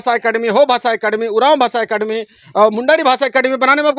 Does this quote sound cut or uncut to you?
uncut